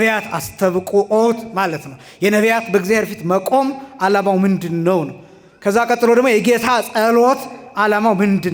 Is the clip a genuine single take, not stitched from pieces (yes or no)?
yes